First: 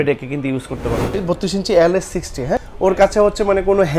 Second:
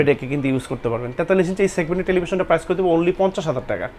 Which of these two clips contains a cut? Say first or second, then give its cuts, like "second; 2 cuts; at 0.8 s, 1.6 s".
first; 2 cuts; at 1.1 s, 2.6 s